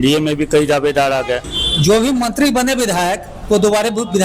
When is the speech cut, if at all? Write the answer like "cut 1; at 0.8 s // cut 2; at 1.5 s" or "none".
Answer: cut 1; at 1.6 s